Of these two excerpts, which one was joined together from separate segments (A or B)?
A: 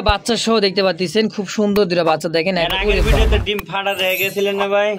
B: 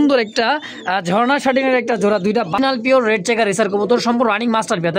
B